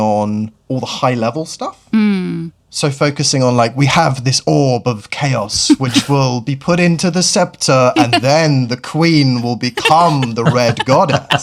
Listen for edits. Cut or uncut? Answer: uncut